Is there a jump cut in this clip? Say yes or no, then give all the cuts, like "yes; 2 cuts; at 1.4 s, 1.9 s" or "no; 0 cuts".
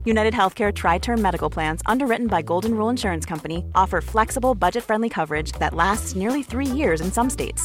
no; 0 cuts